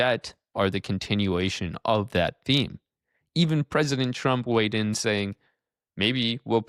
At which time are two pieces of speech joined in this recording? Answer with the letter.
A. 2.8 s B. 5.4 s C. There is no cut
C